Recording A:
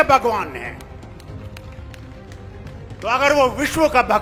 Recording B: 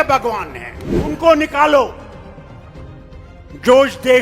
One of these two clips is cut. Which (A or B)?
B